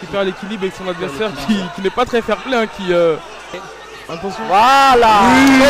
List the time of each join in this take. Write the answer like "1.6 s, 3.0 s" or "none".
3.7 s